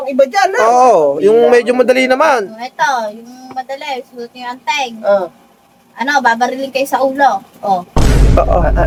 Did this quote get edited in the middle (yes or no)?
no